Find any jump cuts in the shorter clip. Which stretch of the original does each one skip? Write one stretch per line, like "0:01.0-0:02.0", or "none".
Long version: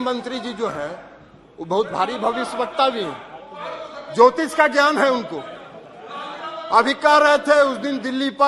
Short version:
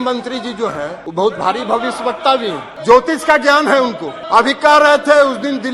0:01.0-0:01.5
0:03.2-0:04.0
0:05.4-0:06.5